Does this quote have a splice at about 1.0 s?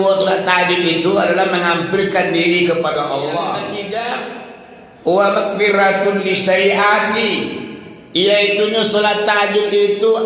no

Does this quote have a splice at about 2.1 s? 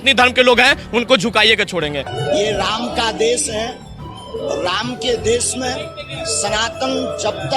yes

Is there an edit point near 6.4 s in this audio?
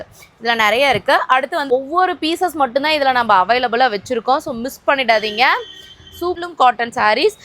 yes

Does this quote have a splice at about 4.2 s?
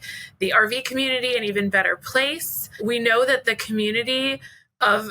no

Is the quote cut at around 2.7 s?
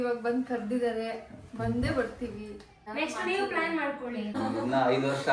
yes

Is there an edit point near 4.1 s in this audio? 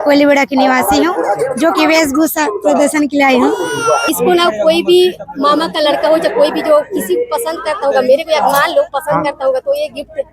yes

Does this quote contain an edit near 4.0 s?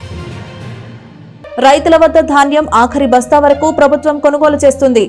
no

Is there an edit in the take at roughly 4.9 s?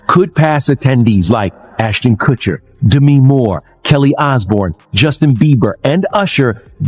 no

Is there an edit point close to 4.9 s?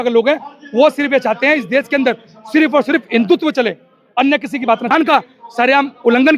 yes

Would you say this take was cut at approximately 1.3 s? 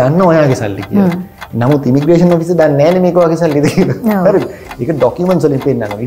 no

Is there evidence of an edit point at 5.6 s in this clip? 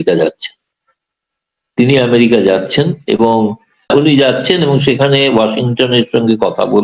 no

